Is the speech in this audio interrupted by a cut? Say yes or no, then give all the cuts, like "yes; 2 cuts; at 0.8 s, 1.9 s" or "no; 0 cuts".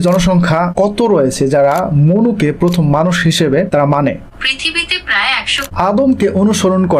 yes; 1 cut; at 5.7 s